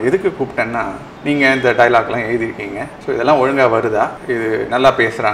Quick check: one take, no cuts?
yes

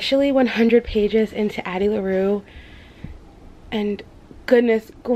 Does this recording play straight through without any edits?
yes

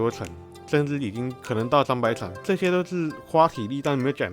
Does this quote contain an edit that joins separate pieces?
yes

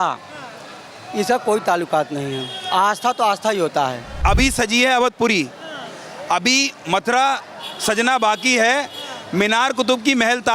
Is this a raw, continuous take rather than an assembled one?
no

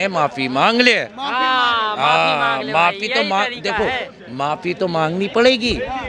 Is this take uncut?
yes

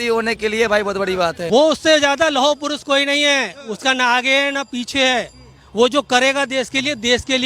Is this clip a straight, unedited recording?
no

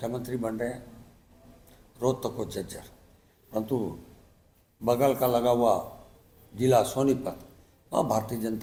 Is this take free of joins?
yes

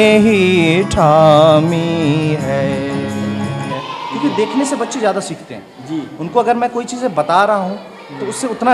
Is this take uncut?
no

